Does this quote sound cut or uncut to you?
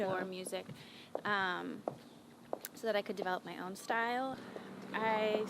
cut